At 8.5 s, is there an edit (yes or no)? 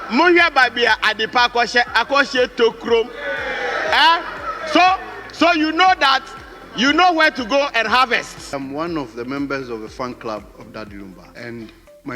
yes